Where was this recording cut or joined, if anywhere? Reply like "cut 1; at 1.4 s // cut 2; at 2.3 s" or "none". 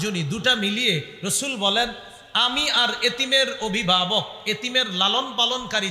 none

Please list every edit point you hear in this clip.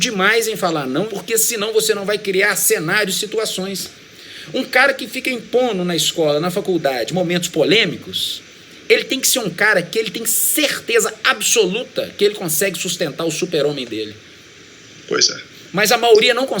cut 1; at 1.1 s

